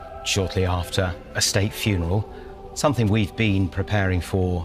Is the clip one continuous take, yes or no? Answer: yes